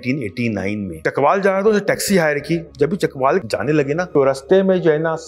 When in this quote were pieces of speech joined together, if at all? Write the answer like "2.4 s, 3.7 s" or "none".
0.9 s, 2.7 s, 3.5 s